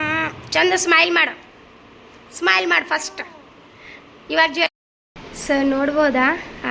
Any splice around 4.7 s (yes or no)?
yes